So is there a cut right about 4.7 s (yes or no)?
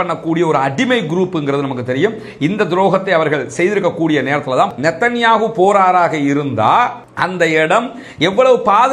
yes